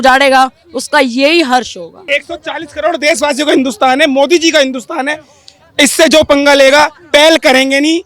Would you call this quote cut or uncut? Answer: cut